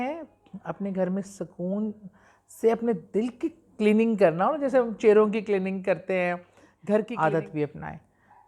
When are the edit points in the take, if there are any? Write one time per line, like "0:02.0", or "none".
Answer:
0:07.1